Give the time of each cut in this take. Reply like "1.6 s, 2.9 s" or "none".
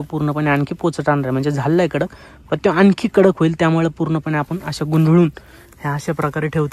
none